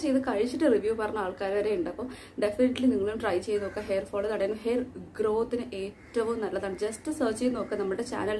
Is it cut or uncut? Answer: uncut